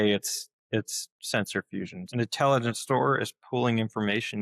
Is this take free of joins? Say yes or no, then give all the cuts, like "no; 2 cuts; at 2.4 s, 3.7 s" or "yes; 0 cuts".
no; 1 cut; at 2.0 s